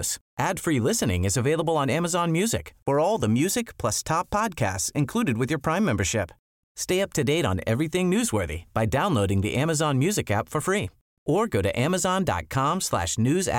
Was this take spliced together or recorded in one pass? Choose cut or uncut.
uncut